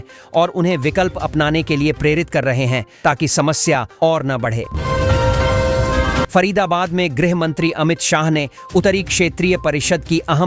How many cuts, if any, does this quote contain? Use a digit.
2